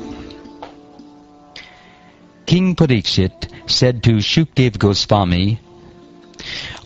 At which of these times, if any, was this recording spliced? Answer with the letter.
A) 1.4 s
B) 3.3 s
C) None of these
A